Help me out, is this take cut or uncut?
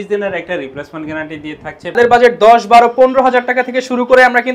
cut